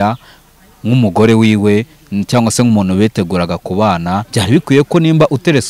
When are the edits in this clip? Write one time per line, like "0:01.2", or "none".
0:04.3

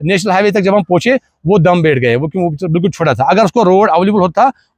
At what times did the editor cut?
none

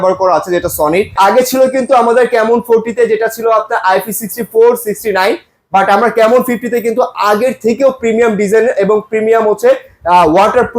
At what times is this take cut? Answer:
0:01.1

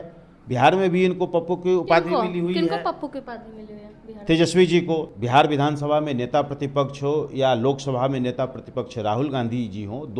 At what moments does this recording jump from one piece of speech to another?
0:05.1

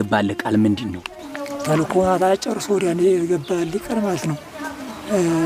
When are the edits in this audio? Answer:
none

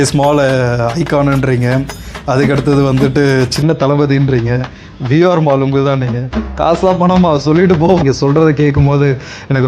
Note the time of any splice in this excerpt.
0:08.0

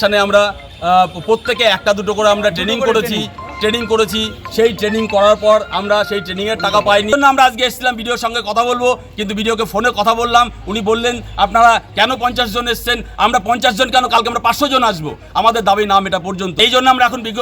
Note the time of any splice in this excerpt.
0:07.1
0:16.6

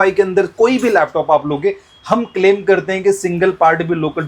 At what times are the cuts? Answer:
none

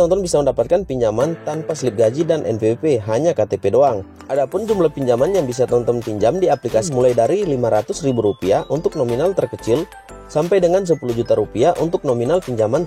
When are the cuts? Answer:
0:04.1
0:06.8

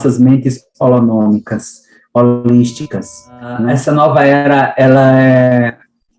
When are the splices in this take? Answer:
0:03.7

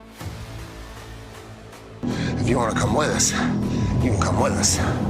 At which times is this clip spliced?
0:01.7

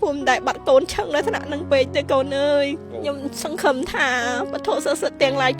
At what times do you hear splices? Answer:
0:02.9

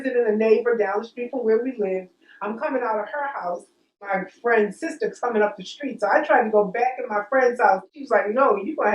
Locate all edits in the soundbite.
0:04.1
0:07.9

